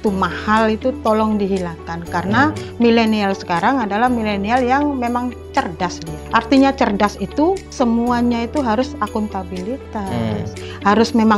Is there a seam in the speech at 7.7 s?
yes; 2 cuts; at 6.1 s, 7.7 s

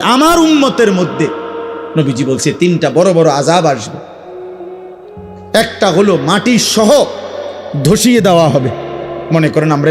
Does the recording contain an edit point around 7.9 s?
no; 2 cuts; at 4.0 s, 5.3 s

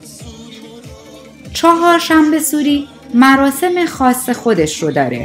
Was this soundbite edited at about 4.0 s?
no; 1 cut; at 1.6 s

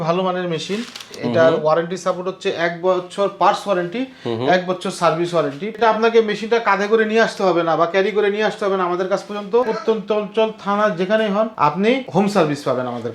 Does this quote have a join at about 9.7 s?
yes; 4 cuts; at 1.2 s, 5.8 s, 9.7 s, 11.9 s

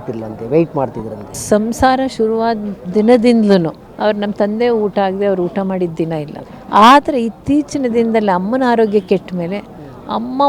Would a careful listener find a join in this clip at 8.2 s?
no; 3 cuts; at 1.3 s, 3.8 s, 6.4 s

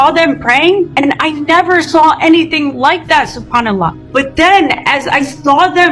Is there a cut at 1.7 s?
no; 0 cuts

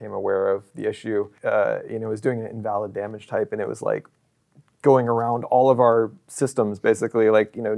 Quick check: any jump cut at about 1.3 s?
yes; 1 cut; at 1.3 s

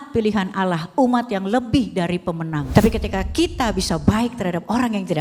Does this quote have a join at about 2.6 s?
yes; 1 cut; at 2.6 s

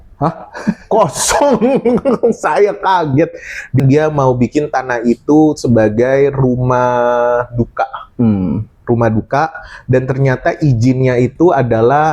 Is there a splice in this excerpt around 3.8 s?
yes; 1 cut; at 3.8 s

